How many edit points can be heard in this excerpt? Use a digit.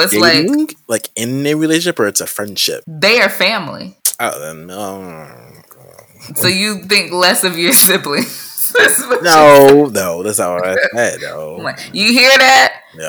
2